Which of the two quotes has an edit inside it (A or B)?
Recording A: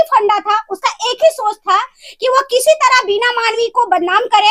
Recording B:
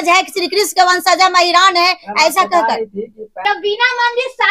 B